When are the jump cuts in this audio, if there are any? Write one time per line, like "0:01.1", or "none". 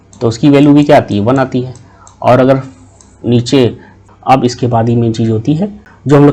0:03.9

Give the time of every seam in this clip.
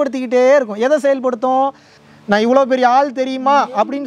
0:01.9

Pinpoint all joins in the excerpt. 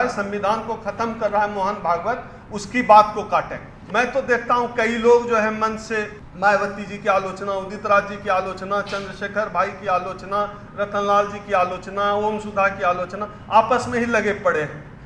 0:03.7
0:06.2

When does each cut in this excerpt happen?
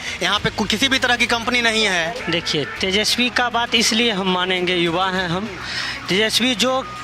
0:02.2

